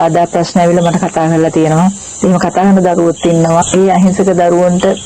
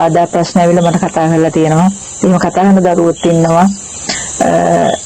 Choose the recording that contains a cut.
first; 1 cut; at 3.6 s

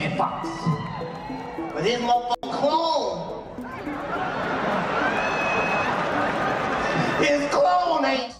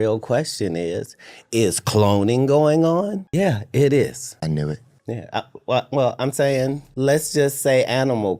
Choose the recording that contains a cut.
second; 3 cuts; at 3.2 s, 4.2 s, 6.8 s

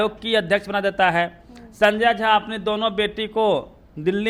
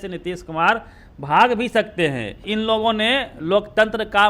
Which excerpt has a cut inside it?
second; 1 cut; at 2.4 s

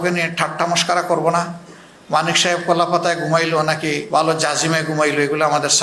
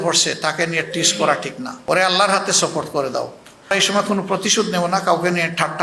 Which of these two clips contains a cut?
second; 1 cut; at 3.7 s

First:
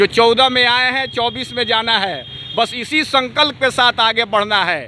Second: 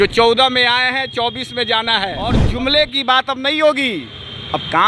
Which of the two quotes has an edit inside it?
second; 1 cut; at 2.4 s

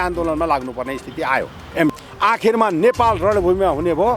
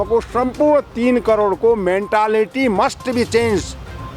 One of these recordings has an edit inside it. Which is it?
first; 1 cut; at 2.0 s

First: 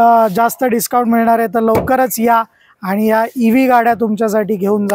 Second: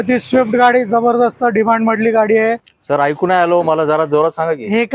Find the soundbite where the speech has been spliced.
second; 1 cut; at 2.7 s

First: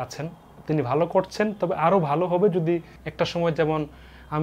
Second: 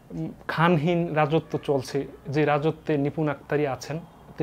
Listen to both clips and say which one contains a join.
first; 1 cut; at 3.0 s

